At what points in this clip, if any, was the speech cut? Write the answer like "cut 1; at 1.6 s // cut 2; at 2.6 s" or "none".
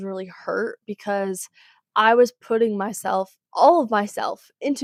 none